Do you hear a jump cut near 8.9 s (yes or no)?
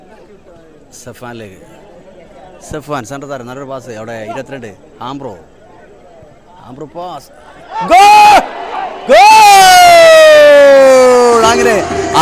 no